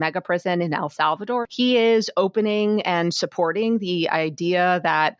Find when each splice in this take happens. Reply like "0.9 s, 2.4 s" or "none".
1.5 s